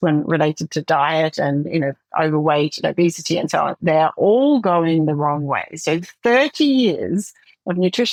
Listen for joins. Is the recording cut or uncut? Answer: uncut